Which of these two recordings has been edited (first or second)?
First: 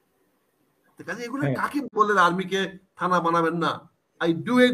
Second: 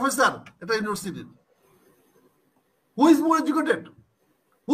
first